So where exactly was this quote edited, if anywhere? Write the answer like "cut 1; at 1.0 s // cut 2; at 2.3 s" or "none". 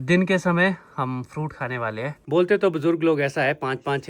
cut 1; at 2.2 s